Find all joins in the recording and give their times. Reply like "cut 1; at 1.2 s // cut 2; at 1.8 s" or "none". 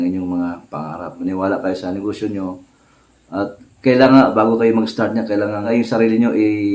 cut 1; at 1.2 s // cut 2; at 5.6 s